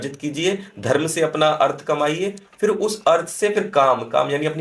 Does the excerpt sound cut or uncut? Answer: uncut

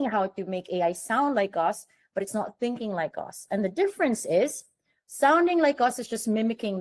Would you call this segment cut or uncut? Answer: uncut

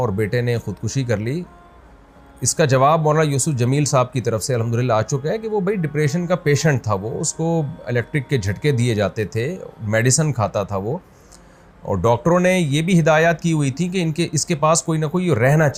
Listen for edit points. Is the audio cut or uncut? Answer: uncut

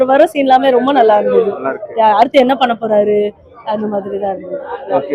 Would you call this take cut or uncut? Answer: uncut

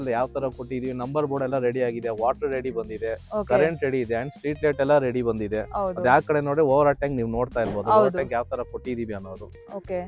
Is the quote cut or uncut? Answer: uncut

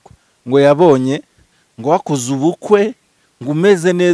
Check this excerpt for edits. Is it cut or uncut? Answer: uncut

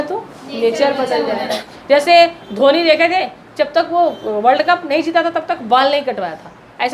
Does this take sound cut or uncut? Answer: cut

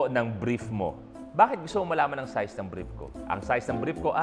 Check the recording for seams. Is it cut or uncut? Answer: uncut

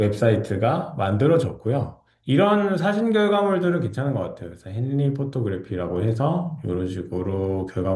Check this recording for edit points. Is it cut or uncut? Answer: uncut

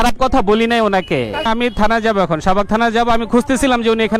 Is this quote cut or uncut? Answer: uncut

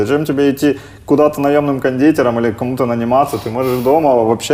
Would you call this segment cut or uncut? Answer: uncut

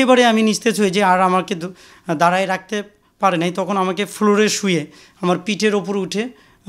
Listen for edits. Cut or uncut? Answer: uncut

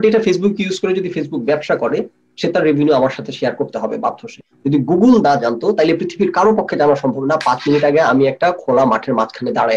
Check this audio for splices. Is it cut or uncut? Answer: cut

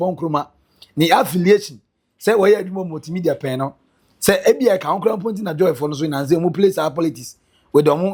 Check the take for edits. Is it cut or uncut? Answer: uncut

